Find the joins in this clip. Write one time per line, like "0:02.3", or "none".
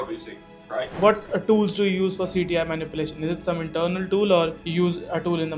0:00.9
0:04.6